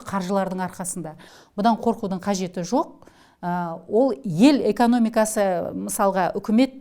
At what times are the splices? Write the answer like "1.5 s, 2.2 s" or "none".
none